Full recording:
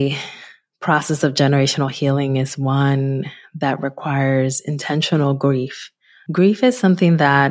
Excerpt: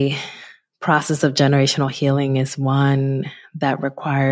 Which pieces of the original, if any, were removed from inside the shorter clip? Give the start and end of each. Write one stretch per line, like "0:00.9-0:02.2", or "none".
none